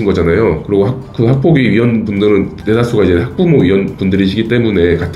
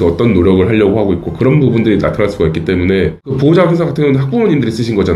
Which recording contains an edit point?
second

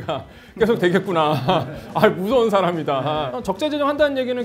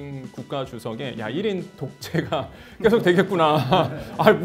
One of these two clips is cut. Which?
first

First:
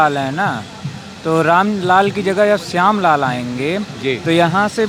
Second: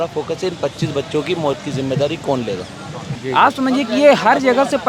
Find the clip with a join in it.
second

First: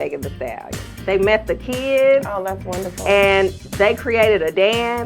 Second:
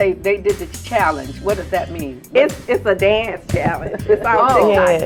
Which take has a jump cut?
first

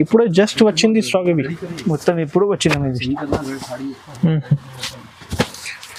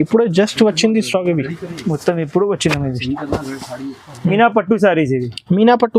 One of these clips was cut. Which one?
second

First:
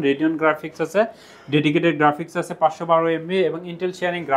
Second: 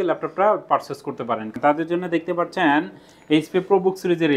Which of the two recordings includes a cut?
second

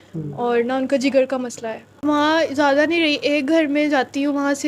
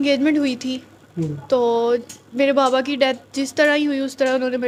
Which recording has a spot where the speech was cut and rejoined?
first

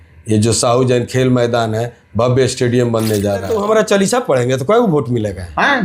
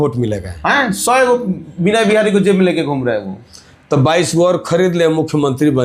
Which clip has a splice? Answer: first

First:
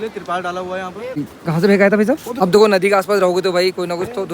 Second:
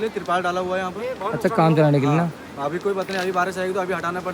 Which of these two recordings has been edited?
first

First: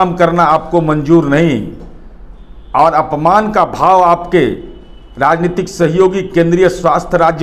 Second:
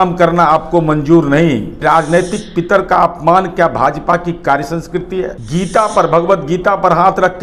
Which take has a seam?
second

